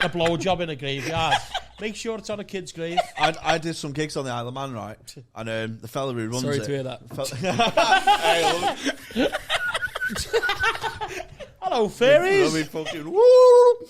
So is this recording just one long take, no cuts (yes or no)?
yes